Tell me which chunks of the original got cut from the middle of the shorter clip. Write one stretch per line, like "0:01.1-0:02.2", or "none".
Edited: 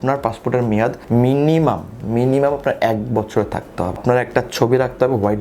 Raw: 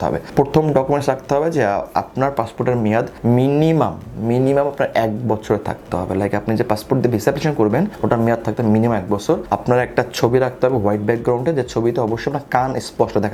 0:06.1-0:09.6